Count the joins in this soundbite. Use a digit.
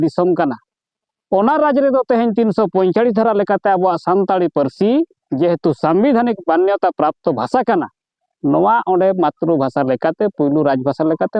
0